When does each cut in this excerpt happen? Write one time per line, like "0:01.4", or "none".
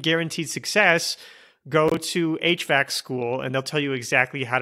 none